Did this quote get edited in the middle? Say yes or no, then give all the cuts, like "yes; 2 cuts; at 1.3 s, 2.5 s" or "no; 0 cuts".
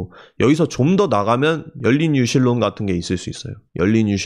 no; 0 cuts